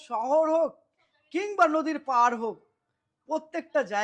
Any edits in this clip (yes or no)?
no